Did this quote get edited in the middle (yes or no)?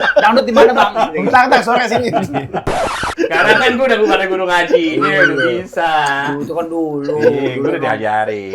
yes